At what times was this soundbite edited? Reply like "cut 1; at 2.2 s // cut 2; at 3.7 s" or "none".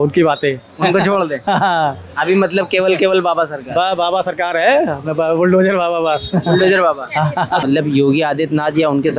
cut 1; at 7.6 s